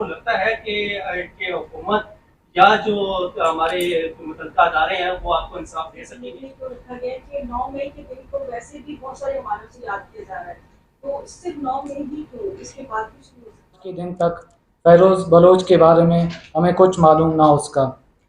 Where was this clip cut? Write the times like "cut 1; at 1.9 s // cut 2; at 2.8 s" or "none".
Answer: cut 1; at 6.2 s // cut 2; at 14.2 s